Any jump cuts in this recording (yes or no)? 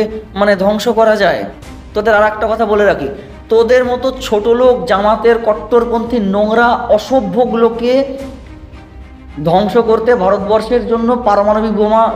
no